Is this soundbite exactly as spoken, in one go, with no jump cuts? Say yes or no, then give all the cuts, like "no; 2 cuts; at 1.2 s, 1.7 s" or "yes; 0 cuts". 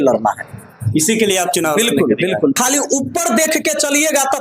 no; 1 cut; at 2.6 s